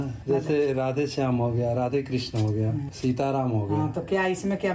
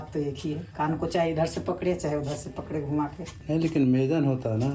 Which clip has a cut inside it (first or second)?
first